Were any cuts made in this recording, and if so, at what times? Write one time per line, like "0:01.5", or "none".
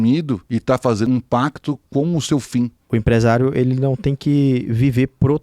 0:01.0
0:02.8